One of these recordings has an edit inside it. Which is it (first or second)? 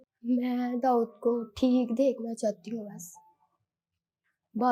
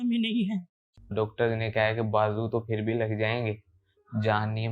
second